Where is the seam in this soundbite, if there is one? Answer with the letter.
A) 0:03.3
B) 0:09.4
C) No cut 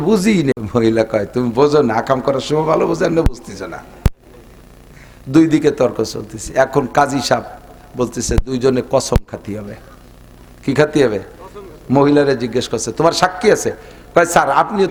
C